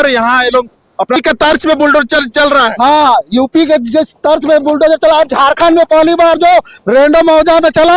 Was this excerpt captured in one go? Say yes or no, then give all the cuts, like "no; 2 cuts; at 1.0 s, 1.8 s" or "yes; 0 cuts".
no; 1 cut; at 1.2 s